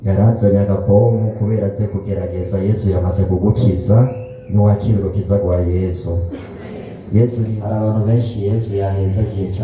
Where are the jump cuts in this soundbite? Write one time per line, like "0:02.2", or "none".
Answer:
0:07.5